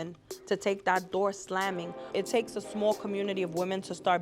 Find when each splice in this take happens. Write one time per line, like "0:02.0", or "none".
0:02.0